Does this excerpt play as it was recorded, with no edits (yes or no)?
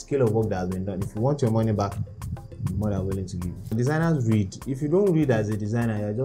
no